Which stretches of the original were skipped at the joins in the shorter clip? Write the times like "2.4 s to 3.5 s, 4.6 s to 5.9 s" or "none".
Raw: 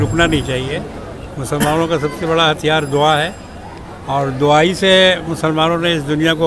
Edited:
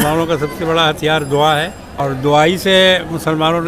3.5 s to 4.0 s